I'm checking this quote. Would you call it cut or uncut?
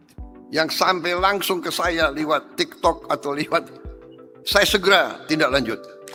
uncut